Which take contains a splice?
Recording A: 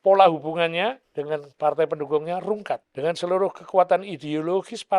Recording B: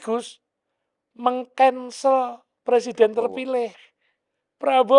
A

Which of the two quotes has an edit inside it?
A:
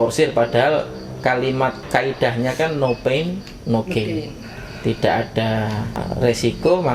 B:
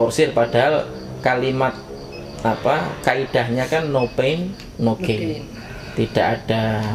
A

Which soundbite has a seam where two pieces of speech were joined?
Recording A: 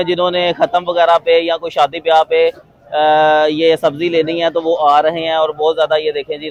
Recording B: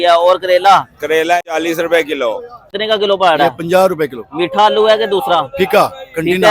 B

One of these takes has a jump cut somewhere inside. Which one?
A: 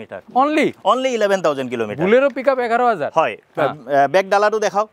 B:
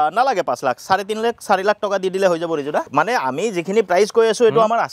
B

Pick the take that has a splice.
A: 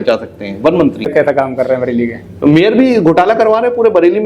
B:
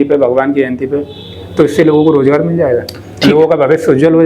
A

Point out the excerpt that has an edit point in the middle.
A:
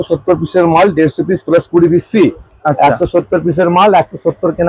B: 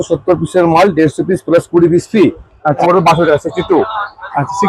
B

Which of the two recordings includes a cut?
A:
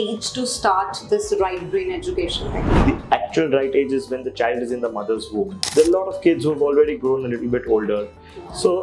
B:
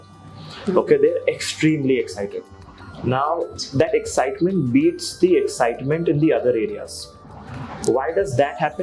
A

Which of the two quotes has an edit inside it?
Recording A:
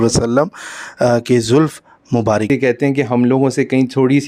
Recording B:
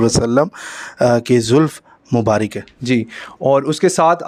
A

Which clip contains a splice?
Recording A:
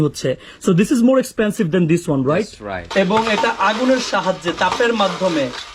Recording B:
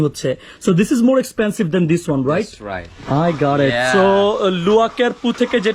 A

